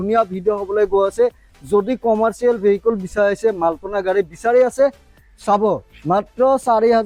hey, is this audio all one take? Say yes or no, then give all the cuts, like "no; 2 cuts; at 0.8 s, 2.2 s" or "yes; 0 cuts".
yes; 0 cuts